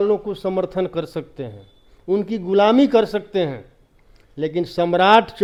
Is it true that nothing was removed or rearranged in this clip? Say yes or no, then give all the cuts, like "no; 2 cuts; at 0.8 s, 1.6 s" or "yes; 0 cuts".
yes; 0 cuts